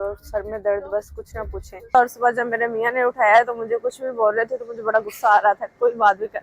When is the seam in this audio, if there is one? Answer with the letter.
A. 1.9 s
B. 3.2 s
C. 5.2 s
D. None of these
A